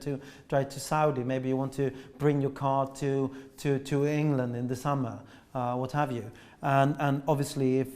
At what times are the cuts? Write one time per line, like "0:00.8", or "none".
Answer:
none